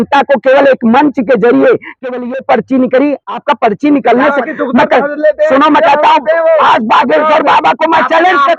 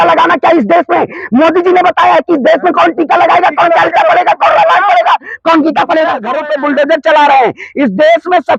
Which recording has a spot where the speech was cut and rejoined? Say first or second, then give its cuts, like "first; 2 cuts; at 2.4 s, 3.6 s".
second; 1 cut; at 6.4 s